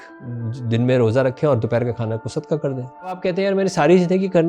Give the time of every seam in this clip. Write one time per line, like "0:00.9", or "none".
0:03.2